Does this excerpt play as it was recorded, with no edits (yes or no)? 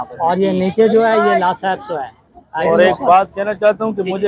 no